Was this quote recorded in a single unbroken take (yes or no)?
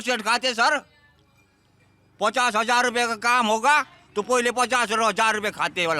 yes